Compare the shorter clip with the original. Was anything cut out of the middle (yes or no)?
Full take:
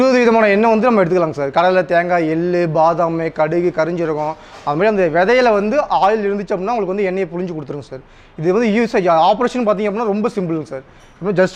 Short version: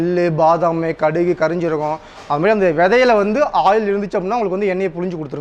no